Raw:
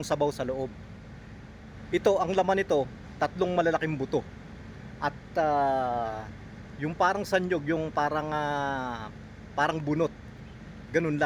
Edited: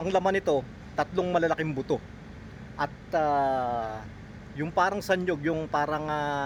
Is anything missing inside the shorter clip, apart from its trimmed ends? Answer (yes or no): no